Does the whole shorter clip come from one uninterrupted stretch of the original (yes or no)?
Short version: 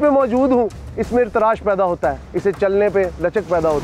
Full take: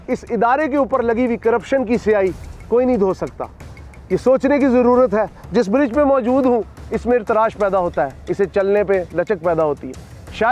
yes